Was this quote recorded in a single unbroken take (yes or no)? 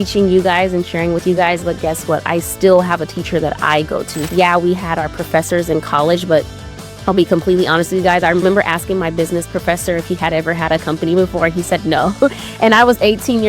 no